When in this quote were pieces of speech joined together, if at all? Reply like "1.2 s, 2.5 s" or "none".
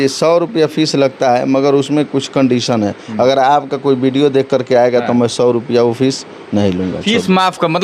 none